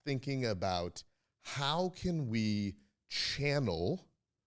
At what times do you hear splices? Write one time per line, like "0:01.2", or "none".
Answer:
none